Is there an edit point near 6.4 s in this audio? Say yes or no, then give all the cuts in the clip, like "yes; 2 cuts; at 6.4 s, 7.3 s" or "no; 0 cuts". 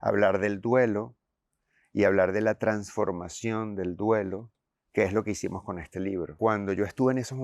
yes; 1 cut; at 6.4 s